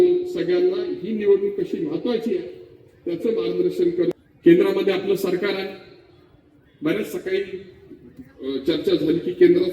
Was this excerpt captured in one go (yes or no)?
no